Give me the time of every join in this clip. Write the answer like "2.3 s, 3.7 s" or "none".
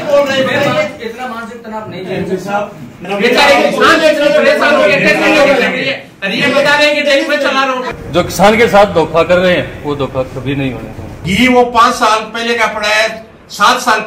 3.0 s, 7.9 s, 11.2 s